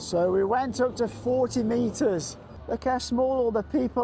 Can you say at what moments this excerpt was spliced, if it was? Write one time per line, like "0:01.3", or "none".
0:02.5